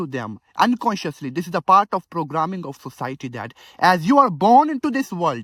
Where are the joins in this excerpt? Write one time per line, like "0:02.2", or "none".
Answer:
none